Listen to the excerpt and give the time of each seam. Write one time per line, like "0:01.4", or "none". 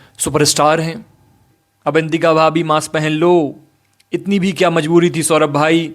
0:01.5